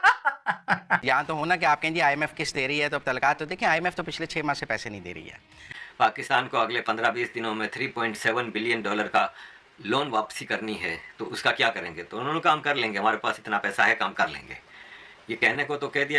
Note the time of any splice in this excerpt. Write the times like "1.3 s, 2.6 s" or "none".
1.0 s, 5.6 s